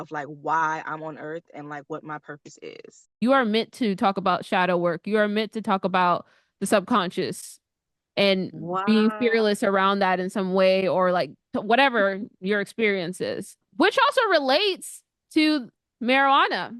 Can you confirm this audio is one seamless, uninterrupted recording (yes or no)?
no